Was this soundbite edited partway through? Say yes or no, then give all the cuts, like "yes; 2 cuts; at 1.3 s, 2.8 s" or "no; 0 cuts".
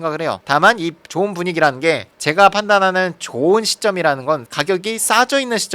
yes; 1 cut; at 2.1 s